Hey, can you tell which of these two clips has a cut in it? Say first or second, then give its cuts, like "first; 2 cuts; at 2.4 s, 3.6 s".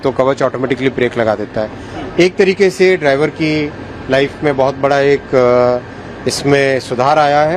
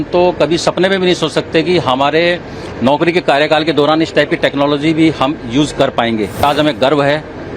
second; 1 cut; at 6.4 s